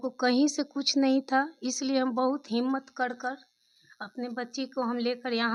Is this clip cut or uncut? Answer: uncut